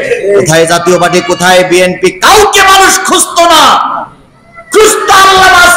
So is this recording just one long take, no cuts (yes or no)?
yes